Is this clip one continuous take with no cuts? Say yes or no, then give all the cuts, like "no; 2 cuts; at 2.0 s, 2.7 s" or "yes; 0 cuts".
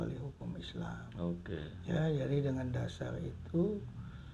yes; 0 cuts